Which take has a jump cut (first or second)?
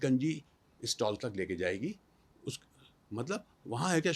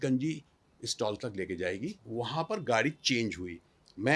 second